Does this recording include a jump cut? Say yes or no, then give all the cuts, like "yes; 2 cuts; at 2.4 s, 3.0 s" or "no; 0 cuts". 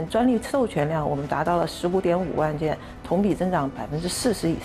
no; 0 cuts